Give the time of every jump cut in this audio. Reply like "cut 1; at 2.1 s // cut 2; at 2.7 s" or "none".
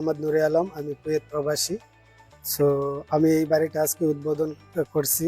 none